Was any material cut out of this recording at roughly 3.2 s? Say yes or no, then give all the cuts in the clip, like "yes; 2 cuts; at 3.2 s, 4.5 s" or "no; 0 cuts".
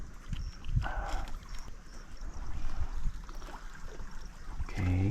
no; 1 cut; at 1.7 s